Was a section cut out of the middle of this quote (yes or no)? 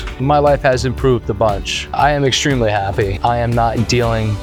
no